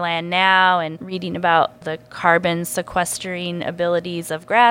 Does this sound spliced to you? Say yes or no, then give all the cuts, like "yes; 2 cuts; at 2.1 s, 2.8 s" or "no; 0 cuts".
yes; 2 cuts; at 1.0 s, 1.9 s